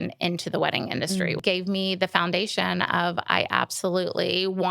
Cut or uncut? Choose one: cut